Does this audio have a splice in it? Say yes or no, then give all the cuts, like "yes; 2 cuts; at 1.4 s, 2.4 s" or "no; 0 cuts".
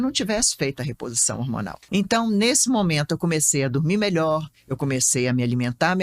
yes; 1 cut; at 1.8 s